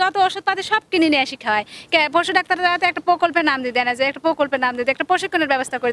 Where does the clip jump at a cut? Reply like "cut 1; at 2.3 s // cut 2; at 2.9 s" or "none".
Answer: none